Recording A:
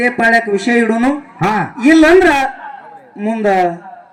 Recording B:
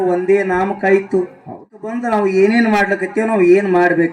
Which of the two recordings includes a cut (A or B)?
B